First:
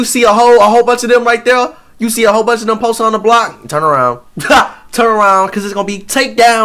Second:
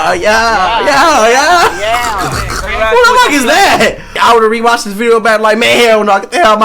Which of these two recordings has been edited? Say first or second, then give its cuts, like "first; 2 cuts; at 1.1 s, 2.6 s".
second; 1 cut; at 4.1 s